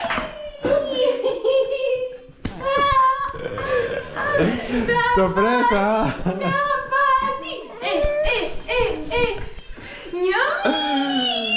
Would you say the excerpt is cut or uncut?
uncut